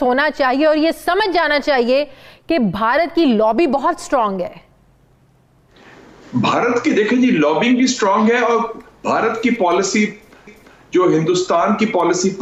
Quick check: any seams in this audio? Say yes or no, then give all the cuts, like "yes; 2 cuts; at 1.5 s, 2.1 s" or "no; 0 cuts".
no; 0 cuts